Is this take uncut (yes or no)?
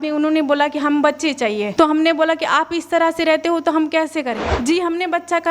no